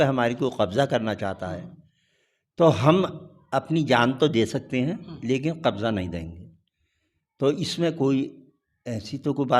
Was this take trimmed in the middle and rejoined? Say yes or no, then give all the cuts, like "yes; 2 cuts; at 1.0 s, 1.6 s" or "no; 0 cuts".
no; 0 cuts